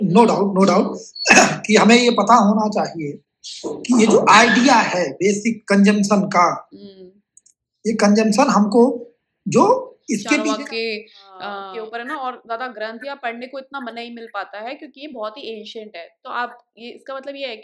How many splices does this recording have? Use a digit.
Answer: 1